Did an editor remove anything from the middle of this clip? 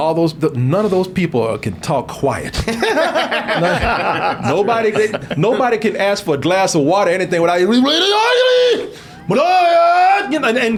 no; 0 cuts

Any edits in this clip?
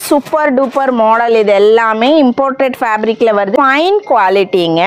yes; 1 cut; at 3.5 s

